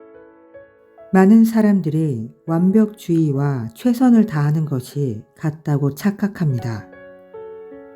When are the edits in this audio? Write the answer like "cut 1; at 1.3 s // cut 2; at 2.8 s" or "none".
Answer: cut 1; at 1.1 s